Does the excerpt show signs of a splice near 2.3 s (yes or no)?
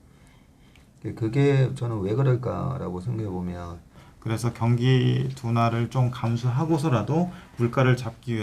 no